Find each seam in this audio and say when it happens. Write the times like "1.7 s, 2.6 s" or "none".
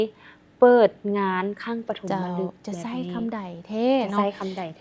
none